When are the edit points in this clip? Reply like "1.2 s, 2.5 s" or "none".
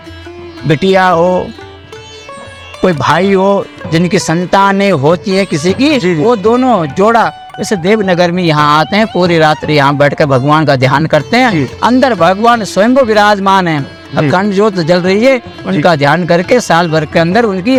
none